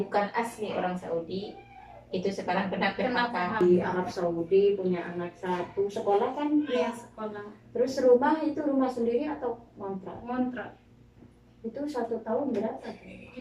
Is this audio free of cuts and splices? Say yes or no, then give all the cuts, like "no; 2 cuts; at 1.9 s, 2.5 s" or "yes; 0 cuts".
no; 1 cut; at 3.6 s